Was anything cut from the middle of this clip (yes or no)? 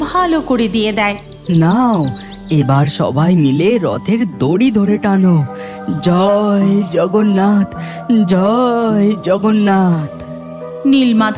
yes